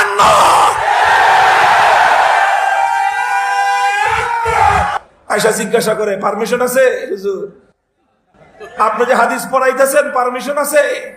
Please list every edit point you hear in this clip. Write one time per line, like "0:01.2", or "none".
0:04.9